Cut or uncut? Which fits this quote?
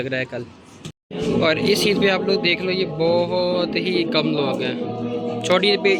uncut